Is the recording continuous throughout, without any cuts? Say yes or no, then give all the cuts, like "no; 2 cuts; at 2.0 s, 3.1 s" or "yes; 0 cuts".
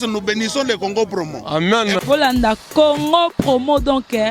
yes; 0 cuts